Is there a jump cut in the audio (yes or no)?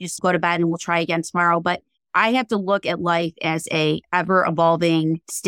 no